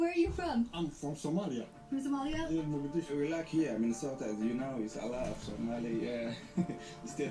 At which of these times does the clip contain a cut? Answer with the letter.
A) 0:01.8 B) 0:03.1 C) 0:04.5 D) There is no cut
B